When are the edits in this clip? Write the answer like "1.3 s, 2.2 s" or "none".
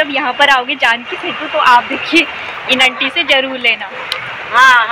none